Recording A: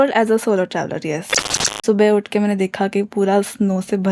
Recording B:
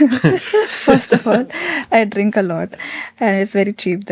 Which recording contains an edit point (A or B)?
A